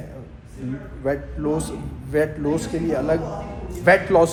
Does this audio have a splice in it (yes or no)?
no